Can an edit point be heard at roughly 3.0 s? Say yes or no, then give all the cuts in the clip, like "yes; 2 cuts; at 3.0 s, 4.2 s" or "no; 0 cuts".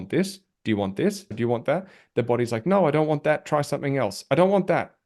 no; 1 cut; at 1.3 s